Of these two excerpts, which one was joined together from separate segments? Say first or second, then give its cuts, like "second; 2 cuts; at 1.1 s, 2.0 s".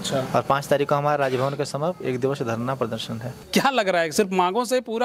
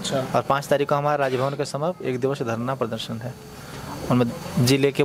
first; 1 cut; at 3.4 s